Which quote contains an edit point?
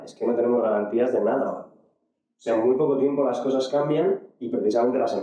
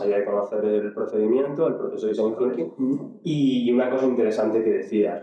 second; 1 cut; at 2.7 s

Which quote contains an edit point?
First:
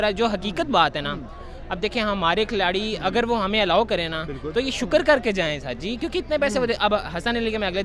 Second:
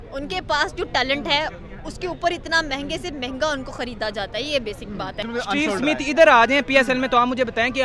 second; 1 cut; at 5.2 s

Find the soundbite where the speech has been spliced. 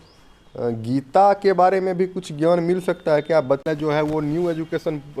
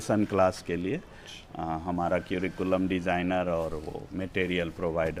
first; 1 cut; at 3.7 s

